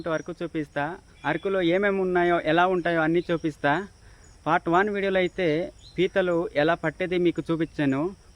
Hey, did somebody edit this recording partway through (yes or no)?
no